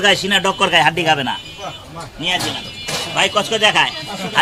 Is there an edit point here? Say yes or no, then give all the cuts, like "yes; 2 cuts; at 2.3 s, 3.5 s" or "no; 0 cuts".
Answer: no; 0 cuts